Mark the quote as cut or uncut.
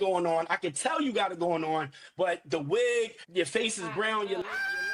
uncut